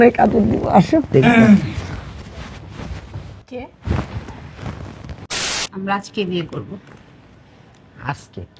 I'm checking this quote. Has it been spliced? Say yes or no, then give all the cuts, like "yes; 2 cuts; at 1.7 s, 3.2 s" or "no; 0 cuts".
yes; 1 cut; at 5.3 s